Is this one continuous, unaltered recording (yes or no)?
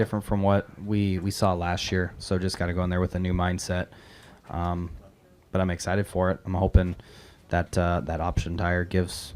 yes